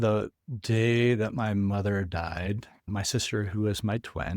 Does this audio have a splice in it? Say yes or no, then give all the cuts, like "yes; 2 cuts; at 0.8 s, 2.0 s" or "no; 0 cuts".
yes; 1 cut; at 2.9 s